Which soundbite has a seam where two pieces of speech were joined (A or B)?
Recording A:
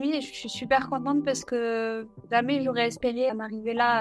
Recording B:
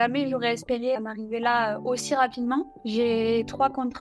B